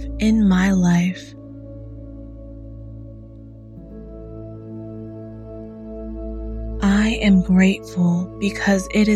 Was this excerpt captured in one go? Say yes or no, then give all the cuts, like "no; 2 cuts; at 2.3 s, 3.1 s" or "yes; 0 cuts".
no; 2 cuts; at 1.1 s, 6.8 s